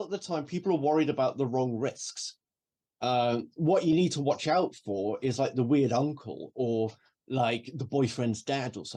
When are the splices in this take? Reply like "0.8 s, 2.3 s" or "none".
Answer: none